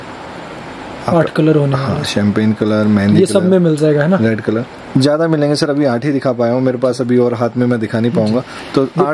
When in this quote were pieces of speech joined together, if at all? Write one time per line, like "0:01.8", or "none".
none